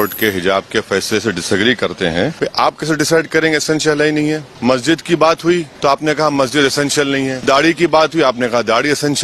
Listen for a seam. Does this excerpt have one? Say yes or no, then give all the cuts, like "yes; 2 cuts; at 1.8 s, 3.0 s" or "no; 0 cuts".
yes; 4 cuts; at 2.3 s, 4.5 s, 5.7 s, 7.4 s